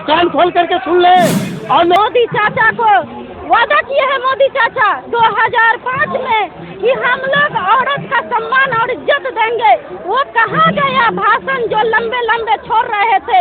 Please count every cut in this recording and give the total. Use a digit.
1